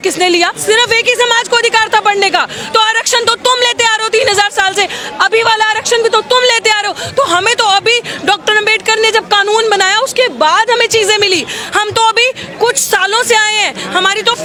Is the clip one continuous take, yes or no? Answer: yes